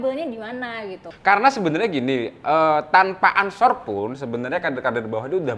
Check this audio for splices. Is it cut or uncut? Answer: cut